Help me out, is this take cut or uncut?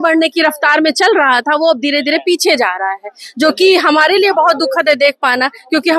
uncut